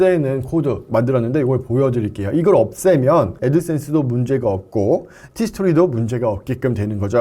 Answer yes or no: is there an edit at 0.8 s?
yes